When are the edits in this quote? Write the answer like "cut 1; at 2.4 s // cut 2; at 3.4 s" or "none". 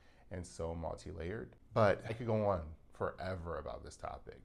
none